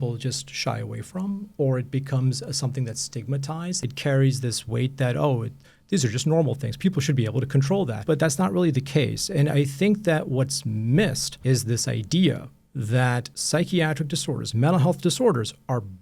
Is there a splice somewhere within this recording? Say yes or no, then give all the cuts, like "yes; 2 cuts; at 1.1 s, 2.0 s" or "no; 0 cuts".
yes; 4 cuts; at 3.8 s, 8.0 s, 11.3 s, 13.3 s